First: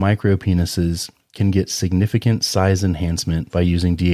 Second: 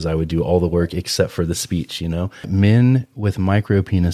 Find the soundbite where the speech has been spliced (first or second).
second